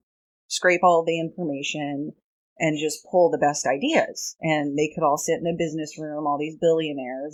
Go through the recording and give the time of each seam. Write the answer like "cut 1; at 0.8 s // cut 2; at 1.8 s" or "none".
none